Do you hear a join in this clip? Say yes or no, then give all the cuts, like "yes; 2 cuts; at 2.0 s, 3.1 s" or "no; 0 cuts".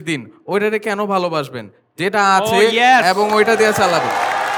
no; 0 cuts